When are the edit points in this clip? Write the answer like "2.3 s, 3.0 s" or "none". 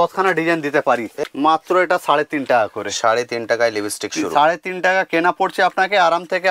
1.1 s